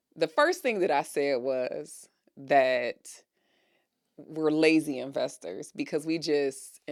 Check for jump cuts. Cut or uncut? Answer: uncut